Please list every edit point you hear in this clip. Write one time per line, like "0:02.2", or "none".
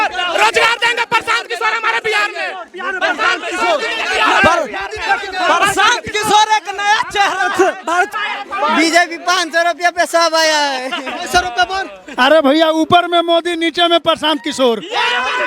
0:08.1